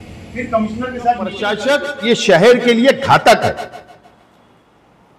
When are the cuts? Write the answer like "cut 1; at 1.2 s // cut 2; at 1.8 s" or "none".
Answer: cut 1; at 1.6 s

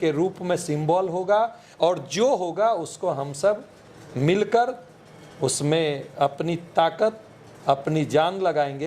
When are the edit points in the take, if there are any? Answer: none

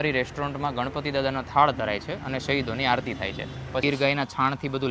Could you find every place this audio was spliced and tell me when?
cut 1; at 3.8 s

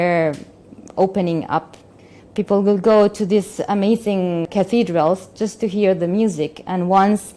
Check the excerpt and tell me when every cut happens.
cut 1; at 1.9 s // cut 2; at 4.5 s

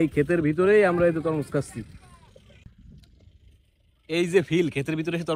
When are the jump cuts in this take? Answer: cut 1; at 2.6 s

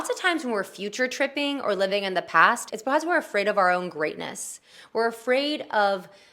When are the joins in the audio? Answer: cut 1; at 2.7 s

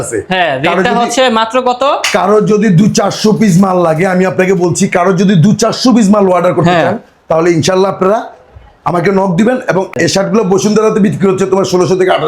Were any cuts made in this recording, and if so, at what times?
cut 1; at 9.9 s

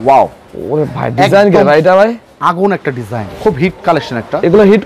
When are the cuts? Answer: cut 1; at 3.3 s

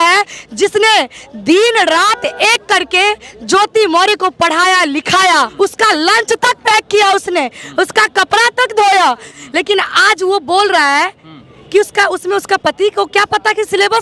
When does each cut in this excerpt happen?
cut 1; at 5.5 s // cut 2; at 9.3 s

